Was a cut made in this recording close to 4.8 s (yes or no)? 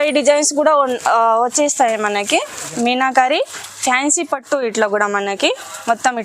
no